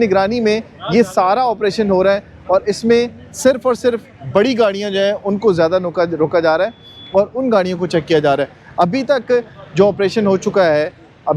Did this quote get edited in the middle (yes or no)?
no